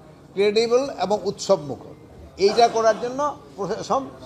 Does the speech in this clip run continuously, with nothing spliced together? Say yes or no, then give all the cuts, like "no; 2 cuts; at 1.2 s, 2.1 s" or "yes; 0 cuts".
yes; 0 cuts